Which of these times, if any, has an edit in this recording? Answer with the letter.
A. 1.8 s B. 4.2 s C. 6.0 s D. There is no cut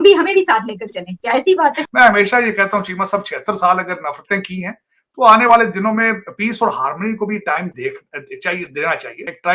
A